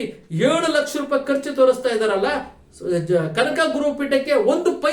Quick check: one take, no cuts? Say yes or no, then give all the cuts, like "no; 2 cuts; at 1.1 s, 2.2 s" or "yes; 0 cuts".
yes; 0 cuts